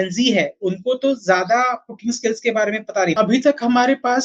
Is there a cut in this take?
yes; 1 cut; at 3.2 s

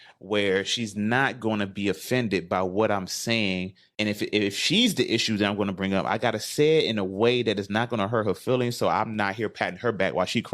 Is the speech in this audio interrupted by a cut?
no; 0 cuts

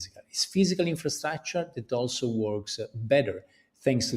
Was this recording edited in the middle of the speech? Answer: no; 0 cuts

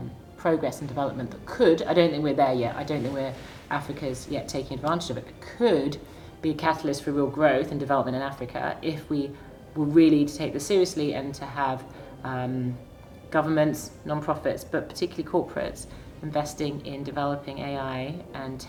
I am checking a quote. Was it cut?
no; 0 cuts

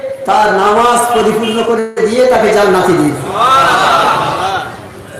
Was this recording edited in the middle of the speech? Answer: no; 0 cuts

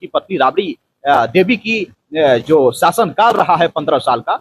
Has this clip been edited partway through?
no; 0 cuts

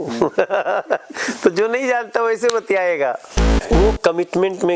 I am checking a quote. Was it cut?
yes; 1 cut; at 3.5 s

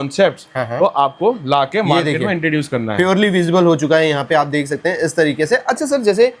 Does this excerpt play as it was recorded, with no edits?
yes; 0 cuts

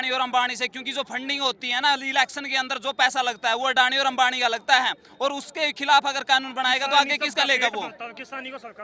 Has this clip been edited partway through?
no; 0 cuts

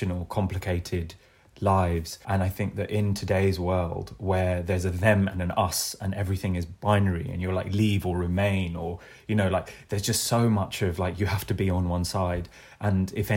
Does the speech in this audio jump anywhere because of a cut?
yes; 1 cut; at 2.1 s

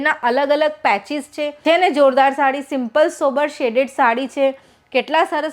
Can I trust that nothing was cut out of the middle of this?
no; 1 cut; at 1.5 s

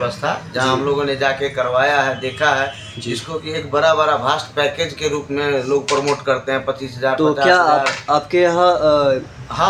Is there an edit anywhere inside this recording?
no; 0 cuts

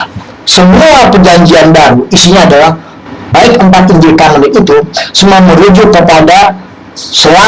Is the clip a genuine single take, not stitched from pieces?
yes; 0 cuts

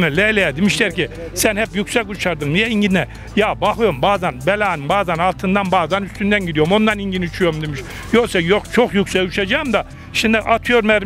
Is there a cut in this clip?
no; 0 cuts

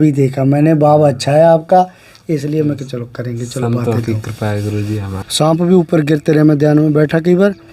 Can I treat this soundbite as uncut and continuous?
no; 1 cut; at 5.0 s

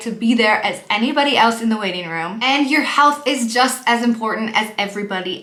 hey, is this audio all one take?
yes; 0 cuts

